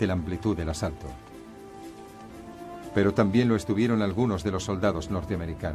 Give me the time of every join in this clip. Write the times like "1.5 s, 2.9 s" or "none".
none